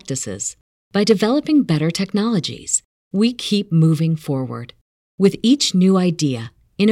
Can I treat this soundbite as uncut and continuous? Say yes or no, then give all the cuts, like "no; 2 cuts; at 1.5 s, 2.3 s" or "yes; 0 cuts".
yes; 0 cuts